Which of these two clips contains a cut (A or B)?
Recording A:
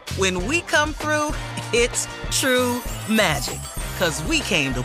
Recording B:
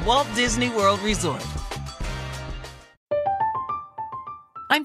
B